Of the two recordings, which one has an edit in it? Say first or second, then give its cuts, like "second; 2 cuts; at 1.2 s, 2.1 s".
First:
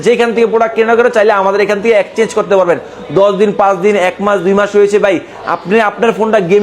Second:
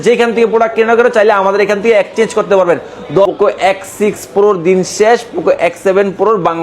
second; 1 cut; at 3.3 s